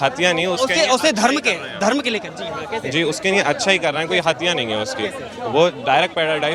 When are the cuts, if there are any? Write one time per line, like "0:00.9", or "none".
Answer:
none